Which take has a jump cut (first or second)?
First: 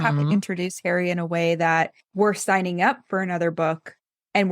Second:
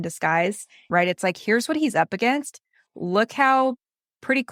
first